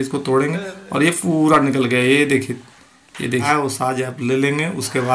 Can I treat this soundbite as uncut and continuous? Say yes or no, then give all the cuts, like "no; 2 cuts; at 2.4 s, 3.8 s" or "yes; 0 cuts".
no; 1 cut; at 3.5 s